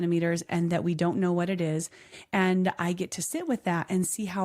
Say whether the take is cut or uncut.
uncut